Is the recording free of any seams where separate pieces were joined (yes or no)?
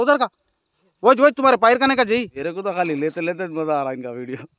no